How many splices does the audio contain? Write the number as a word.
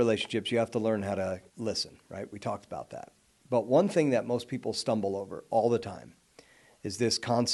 zero